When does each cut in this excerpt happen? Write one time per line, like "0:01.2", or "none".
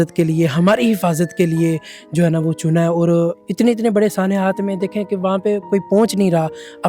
0:03.4